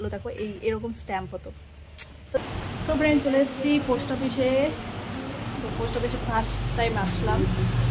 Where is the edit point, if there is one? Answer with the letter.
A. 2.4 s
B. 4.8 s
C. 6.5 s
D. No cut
A